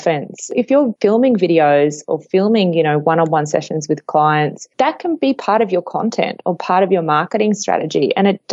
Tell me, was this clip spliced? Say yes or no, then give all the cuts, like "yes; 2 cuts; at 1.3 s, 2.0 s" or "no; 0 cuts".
no; 0 cuts